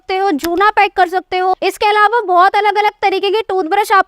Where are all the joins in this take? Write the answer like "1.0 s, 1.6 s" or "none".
1.5 s